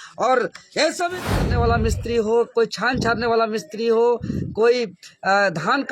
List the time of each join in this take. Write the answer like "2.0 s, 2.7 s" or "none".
1.4 s